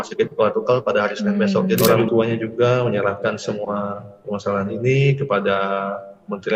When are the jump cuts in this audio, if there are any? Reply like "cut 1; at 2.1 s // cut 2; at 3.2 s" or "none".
cut 1; at 1.8 s